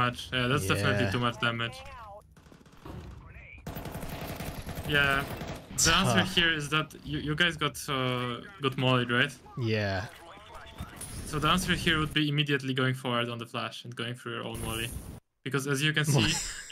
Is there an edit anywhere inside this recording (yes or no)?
yes